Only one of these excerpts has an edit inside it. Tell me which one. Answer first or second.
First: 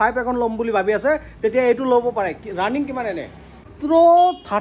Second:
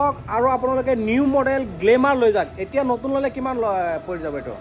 first